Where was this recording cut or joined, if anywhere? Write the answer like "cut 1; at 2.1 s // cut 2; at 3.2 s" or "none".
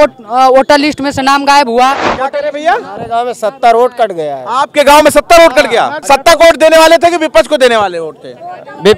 cut 1; at 2.2 s // cut 2; at 6.0 s